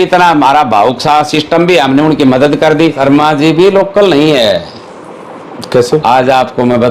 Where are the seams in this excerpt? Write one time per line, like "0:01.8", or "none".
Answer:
0:03.0